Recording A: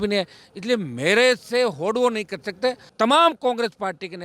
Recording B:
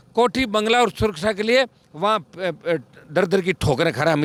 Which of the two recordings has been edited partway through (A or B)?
A